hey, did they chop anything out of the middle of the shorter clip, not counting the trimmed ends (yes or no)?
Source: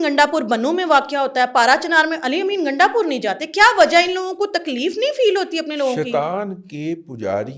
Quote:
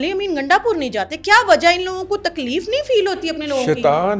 no